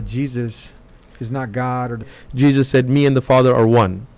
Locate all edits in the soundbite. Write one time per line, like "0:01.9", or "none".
0:02.2